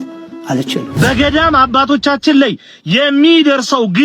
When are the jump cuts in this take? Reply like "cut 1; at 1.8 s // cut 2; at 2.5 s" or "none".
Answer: cut 1; at 0.9 s